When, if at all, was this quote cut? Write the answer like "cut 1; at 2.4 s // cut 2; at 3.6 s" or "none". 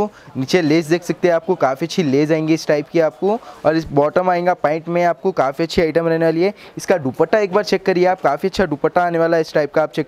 none